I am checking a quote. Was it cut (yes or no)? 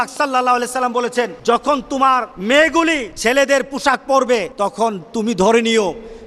yes